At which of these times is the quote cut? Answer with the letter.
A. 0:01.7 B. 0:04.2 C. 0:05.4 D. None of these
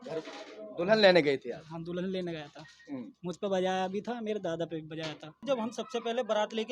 C